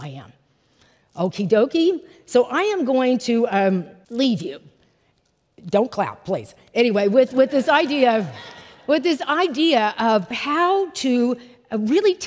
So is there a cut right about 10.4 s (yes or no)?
yes